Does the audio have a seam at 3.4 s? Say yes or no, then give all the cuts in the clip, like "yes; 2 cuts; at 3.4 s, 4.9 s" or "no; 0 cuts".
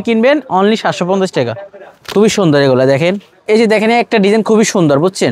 yes; 1 cut; at 3.4 s